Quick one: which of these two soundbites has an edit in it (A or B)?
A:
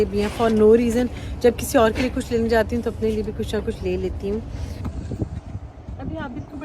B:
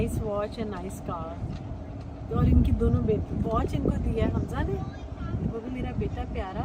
A